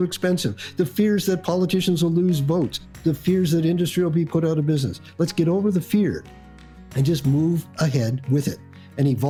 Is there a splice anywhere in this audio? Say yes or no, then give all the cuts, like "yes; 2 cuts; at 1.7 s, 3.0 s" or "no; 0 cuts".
no; 0 cuts